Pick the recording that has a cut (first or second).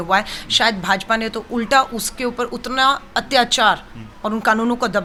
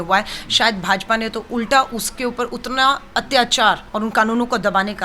second